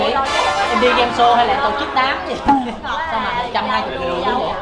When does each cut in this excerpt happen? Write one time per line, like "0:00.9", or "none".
none

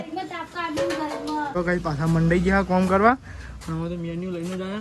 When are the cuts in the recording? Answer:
0:01.6

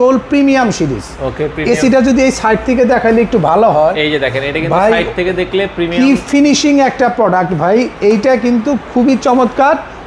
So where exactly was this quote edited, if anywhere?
none

